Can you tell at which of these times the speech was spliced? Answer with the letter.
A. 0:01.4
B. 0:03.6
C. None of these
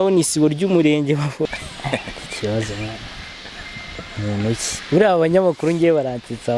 A